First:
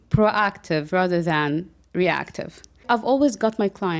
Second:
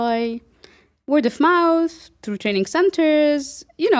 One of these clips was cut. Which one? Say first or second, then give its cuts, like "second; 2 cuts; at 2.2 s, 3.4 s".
first; 1 cut; at 2.8 s